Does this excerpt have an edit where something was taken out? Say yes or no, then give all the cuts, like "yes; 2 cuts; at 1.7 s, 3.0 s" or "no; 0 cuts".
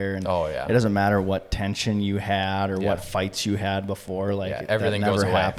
no; 0 cuts